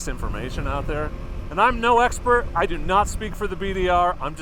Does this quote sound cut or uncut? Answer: uncut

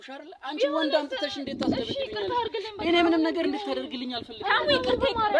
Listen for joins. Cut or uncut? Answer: uncut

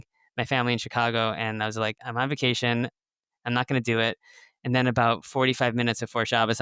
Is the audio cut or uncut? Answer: cut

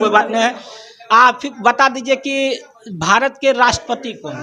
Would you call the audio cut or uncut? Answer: uncut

